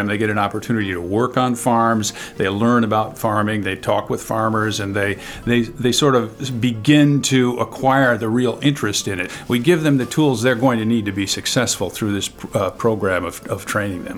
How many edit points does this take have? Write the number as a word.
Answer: one